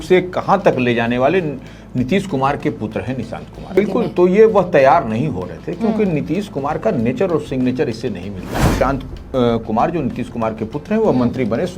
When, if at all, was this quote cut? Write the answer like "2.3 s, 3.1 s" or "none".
3.7 s, 8.7 s